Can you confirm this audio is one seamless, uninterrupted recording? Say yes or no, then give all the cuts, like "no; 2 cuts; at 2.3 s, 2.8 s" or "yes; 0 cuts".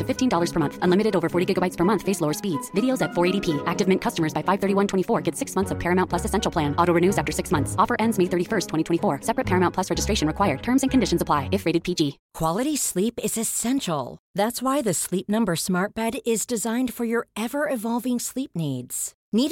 no; 1 cut; at 12.2 s